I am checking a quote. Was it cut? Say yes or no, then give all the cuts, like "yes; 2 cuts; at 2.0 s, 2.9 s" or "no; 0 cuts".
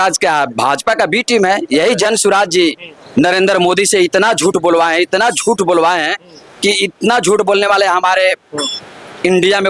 no; 0 cuts